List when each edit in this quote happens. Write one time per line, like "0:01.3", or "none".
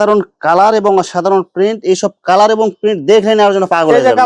none